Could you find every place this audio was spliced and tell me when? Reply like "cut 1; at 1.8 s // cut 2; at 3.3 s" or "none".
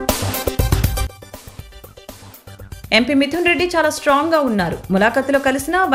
none